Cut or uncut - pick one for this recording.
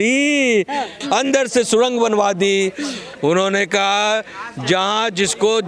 cut